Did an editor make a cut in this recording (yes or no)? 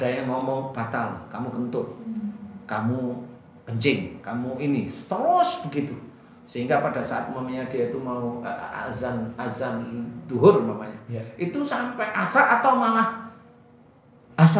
no